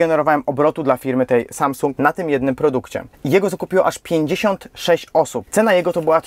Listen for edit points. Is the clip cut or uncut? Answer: cut